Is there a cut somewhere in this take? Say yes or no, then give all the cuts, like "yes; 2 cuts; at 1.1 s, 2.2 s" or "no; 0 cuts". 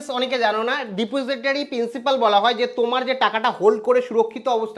no; 0 cuts